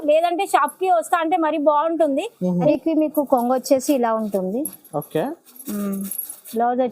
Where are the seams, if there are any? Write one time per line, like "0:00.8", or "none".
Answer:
0:02.7